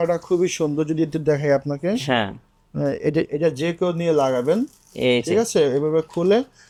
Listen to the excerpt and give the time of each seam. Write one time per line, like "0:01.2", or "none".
none